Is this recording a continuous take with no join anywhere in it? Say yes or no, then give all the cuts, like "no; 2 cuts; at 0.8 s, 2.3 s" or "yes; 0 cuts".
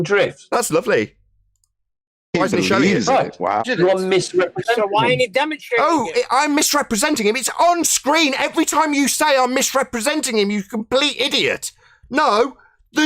no; 1 cut; at 3.6 s